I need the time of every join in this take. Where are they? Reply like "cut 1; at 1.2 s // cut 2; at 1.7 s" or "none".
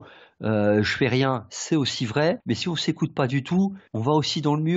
cut 1; at 2.4 s // cut 2; at 3.9 s